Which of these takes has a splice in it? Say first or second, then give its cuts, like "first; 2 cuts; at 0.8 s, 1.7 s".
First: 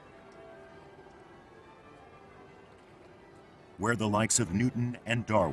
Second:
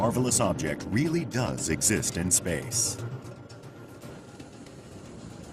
second; 1 cut; at 1.6 s